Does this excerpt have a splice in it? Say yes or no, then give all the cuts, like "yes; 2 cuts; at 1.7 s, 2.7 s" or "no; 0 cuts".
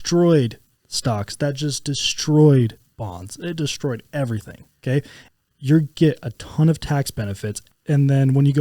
yes; 2 cuts; at 5.2 s, 7.6 s